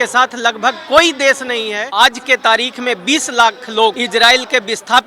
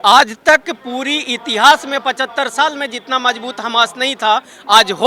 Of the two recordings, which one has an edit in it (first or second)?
first